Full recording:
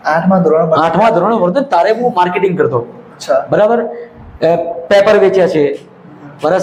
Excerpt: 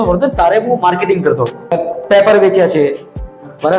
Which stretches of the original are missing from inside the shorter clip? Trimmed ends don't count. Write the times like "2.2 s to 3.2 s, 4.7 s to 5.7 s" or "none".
3.1 s to 4.5 s